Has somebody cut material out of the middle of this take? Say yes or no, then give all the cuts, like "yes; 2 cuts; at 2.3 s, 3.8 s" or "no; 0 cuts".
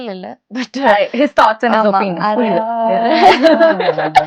no; 0 cuts